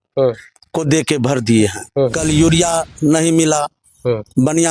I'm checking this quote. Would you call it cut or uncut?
cut